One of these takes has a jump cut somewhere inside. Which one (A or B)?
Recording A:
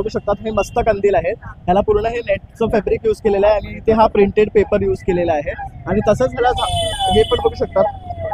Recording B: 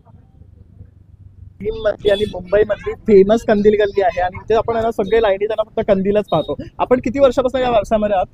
B